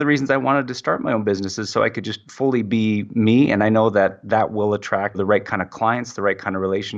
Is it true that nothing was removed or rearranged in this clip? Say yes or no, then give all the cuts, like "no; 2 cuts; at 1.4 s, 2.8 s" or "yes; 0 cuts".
no; 1 cut; at 5.2 s